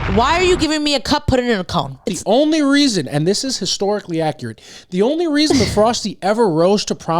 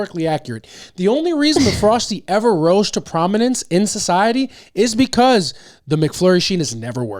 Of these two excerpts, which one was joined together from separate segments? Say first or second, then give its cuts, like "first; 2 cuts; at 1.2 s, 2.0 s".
first; 1 cut; at 2.1 s